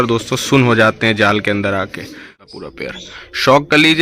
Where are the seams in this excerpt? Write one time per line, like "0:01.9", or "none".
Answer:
0:02.3